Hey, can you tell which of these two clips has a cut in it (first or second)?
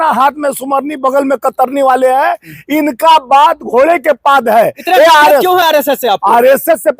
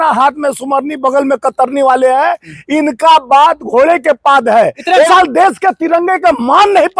second